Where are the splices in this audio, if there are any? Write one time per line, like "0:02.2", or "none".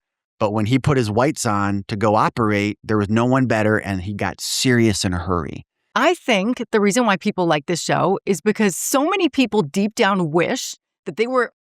0:05.9